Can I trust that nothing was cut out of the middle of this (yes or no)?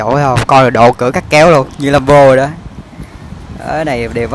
yes